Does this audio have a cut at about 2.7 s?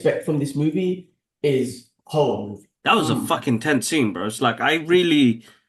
yes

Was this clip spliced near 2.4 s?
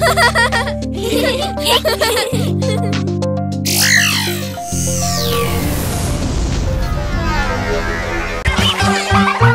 no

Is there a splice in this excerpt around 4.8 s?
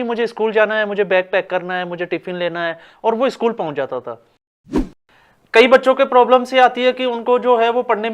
yes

